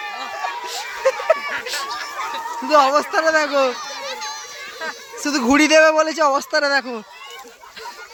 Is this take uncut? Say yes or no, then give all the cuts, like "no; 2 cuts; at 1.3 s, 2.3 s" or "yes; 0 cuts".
yes; 0 cuts